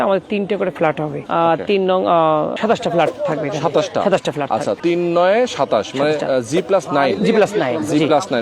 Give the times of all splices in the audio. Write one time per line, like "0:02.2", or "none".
0:01.2
0:02.5
0:04.8